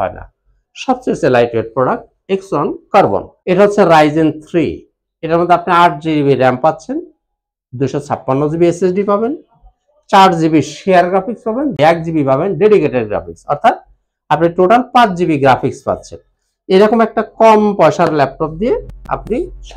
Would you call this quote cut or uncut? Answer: cut